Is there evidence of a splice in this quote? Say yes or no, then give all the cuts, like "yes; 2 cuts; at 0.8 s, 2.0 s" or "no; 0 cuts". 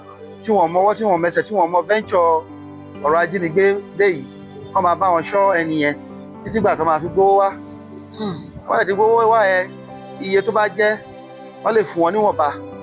no; 0 cuts